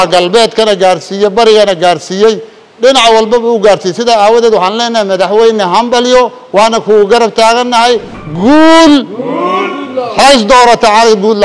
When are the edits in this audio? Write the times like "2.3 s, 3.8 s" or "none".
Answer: 8.2 s